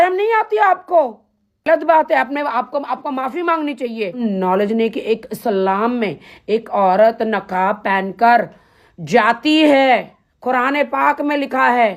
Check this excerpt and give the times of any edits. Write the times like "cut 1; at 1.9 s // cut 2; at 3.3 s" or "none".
cut 1; at 4.2 s